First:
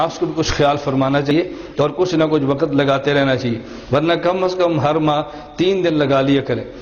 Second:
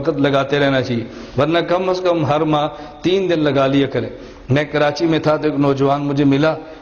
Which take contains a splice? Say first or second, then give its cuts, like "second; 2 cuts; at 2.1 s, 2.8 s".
first; 1 cut; at 1.3 s